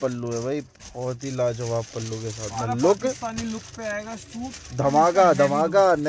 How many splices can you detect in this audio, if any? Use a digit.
0